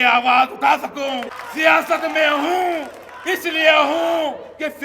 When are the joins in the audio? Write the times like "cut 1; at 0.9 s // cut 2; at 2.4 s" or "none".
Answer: cut 1; at 1.4 s